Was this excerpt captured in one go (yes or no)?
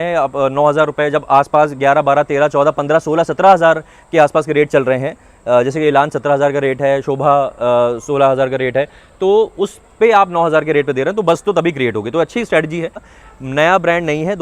no